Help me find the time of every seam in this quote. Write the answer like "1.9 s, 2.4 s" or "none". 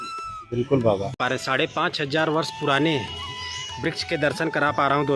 1.1 s